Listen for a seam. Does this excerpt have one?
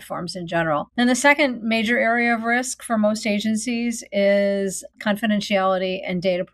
yes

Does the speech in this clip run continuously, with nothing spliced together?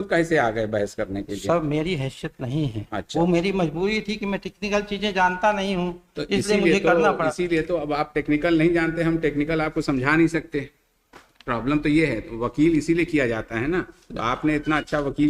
yes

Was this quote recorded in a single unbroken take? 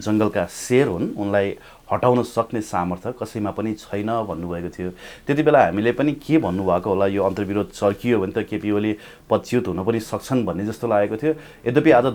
yes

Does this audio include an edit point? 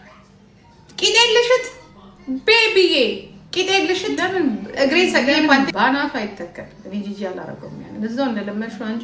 yes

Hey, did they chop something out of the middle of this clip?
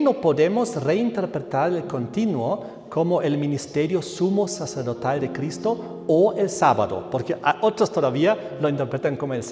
no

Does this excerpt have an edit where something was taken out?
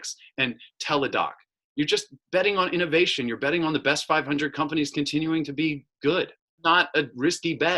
yes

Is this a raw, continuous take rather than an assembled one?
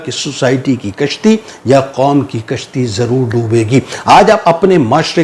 yes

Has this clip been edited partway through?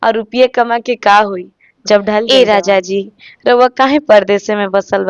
yes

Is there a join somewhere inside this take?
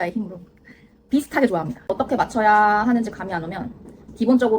yes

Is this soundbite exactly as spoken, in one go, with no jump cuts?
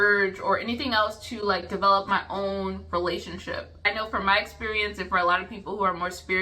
no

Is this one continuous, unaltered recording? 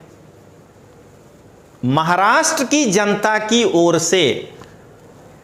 yes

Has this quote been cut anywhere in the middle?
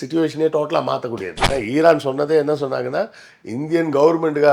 yes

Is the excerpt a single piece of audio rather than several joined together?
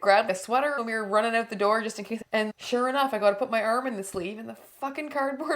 no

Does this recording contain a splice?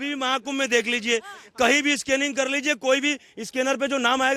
no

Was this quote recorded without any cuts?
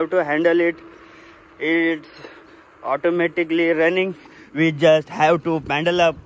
yes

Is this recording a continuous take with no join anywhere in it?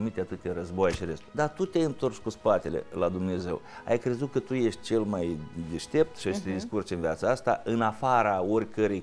no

